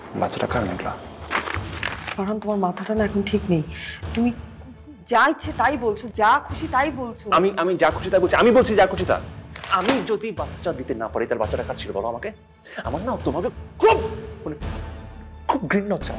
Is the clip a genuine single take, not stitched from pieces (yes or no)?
no